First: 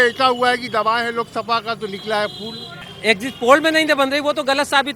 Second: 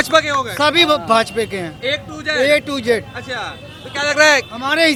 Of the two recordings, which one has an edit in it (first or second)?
first